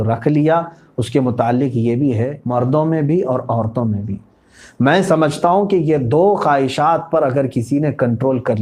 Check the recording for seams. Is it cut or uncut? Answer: cut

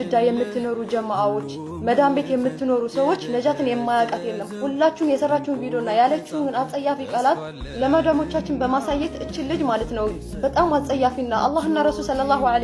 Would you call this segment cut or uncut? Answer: uncut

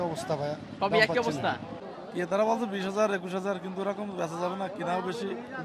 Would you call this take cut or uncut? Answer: cut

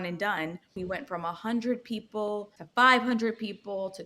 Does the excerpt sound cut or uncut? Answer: cut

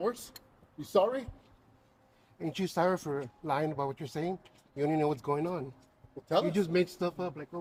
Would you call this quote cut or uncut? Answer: uncut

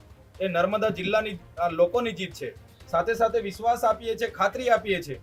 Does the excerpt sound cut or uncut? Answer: uncut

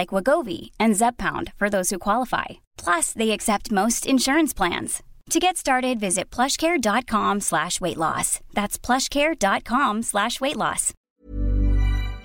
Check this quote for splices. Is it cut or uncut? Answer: cut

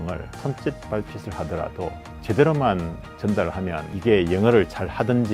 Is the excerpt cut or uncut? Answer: uncut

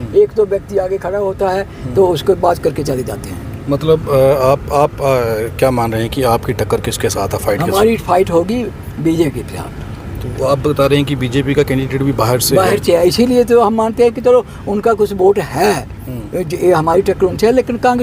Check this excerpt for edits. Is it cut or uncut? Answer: uncut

